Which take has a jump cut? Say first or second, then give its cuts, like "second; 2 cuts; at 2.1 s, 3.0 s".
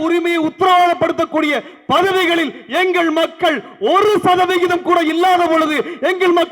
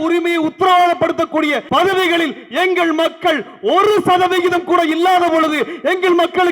second; 1 cut; at 1.6 s